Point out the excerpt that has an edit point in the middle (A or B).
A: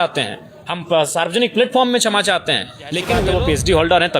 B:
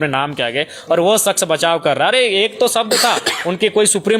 A